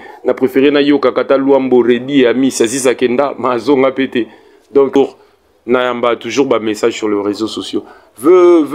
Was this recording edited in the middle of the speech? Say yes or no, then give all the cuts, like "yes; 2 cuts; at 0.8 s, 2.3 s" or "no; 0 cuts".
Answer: yes; 1 cut; at 5.0 s